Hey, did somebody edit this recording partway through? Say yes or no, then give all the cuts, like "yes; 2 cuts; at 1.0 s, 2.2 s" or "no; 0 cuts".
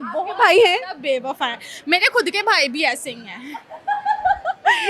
no; 0 cuts